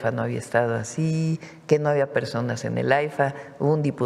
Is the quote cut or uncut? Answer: uncut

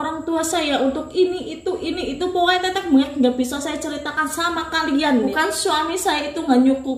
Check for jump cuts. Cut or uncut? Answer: cut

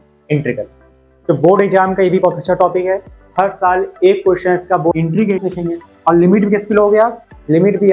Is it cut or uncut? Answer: cut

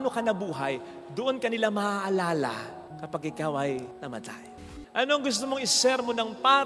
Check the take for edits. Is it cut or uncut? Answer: cut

